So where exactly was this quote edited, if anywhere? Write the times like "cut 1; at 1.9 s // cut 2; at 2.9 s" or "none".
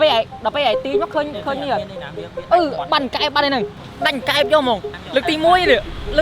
cut 1; at 3.8 s // cut 2; at 4.9 s